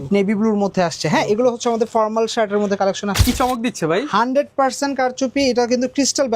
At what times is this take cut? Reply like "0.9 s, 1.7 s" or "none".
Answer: 3.2 s